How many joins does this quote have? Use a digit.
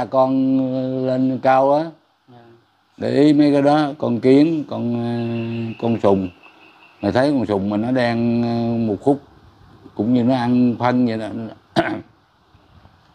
0